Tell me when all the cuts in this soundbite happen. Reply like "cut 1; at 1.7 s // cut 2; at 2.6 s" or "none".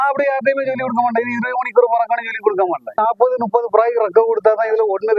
cut 1; at 3.0 s